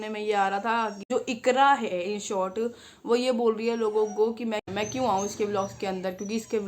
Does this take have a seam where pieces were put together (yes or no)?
yes